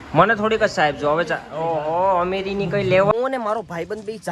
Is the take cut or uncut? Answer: cut